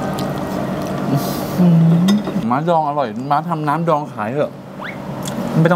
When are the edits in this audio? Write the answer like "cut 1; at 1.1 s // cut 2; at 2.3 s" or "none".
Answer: cut 1; at 2.4 s